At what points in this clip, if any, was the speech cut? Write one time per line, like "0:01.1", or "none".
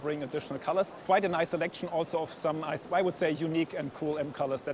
0:01.0